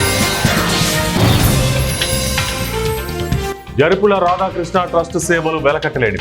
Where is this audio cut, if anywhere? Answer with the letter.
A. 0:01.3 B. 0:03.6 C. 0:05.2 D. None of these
B